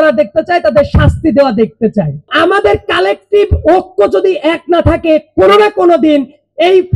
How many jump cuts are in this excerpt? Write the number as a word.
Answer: one